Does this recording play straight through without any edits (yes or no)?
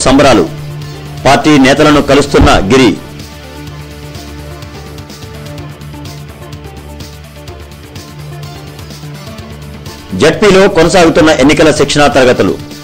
no